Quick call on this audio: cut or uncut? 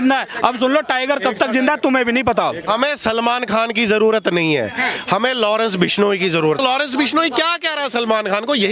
cut